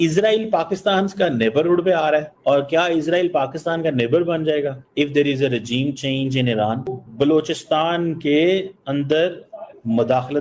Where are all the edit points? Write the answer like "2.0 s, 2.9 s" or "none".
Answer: 7.0 s